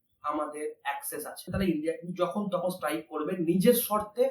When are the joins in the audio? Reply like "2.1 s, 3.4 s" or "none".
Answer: 1.4 s